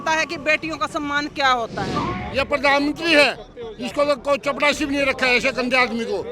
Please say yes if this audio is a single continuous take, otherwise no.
no